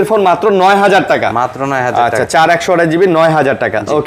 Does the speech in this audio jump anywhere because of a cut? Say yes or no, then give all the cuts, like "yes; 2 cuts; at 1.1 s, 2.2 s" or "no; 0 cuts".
no; 0 cuts